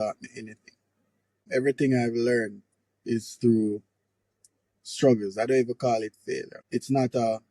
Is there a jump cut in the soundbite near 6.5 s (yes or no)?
yes